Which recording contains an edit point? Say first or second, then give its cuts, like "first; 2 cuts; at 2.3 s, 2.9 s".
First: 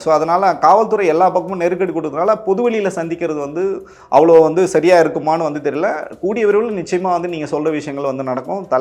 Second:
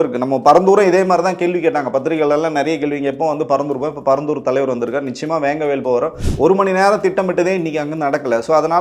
second; 1 cut; at 6.2 s